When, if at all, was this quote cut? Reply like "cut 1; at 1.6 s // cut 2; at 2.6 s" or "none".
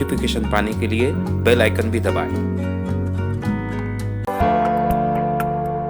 cut 1; at 4.3 s